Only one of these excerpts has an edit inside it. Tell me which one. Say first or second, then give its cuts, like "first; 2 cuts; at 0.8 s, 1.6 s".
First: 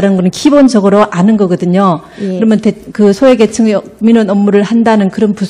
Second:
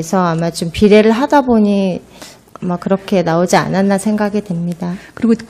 second; 1 cut; at 3.5 s